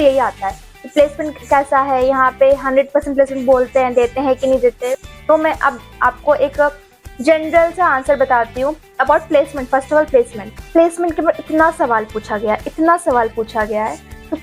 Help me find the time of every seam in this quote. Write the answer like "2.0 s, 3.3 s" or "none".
none